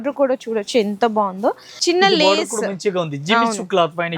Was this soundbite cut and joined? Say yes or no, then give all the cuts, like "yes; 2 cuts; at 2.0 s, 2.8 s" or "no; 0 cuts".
yes; 1 cut; at 1.7 s